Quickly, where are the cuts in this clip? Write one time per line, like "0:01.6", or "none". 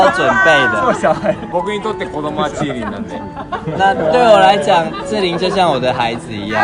0:01.4

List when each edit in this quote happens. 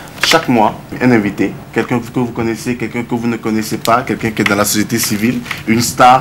0:01.0

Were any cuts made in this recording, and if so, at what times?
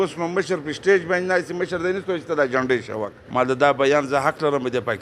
0:03.2

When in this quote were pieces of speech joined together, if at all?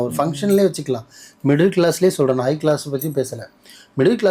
none

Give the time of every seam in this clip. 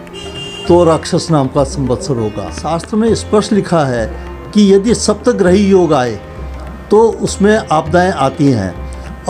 0:02.5

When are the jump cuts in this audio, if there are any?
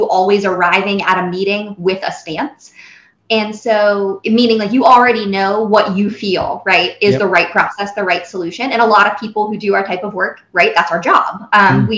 0:03.1

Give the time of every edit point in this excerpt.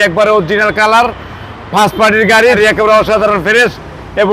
0:02.6

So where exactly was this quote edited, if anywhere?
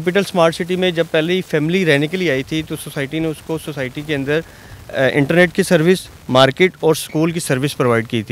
none

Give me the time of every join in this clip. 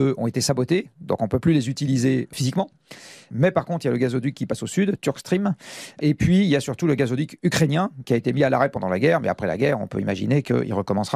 none

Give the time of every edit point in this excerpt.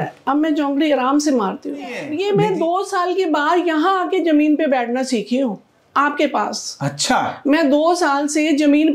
0:02.0

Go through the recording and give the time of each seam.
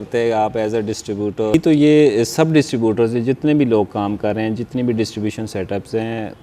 0:01.5

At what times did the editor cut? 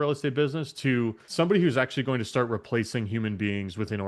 0:01.2

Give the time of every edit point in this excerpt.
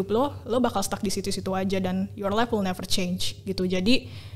none

